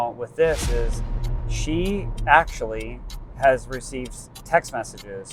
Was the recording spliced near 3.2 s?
no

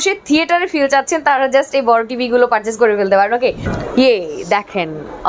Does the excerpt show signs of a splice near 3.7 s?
yes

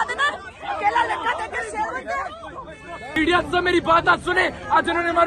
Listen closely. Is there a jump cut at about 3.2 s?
yes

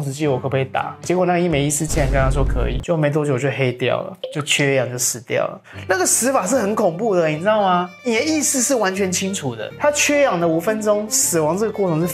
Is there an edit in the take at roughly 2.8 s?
yes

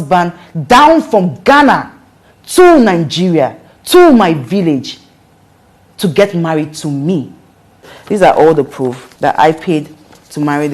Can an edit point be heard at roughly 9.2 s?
no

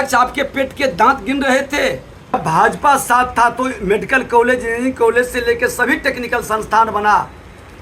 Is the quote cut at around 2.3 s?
yes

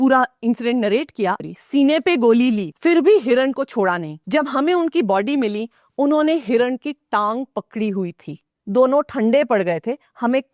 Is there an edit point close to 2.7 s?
yes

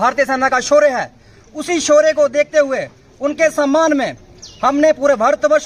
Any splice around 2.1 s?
no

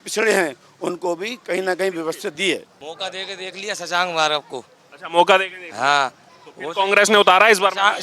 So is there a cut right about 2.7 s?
yes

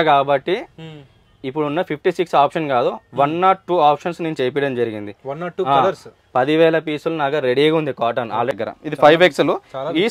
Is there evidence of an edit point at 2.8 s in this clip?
no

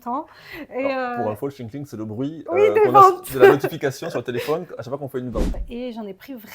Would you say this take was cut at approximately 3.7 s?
no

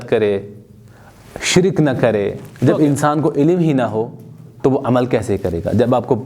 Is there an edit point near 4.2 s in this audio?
no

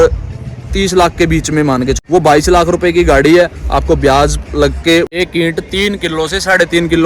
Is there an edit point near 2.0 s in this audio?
yes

